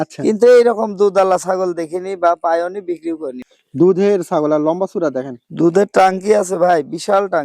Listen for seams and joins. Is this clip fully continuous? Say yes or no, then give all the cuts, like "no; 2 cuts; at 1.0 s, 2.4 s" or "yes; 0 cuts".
no; 1 cut; at 3.3 s